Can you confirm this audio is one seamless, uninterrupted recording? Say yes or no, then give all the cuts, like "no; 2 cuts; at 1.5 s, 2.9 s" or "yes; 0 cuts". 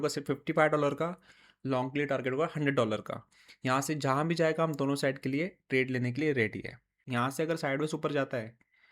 no; 1 cut; at 6.9 s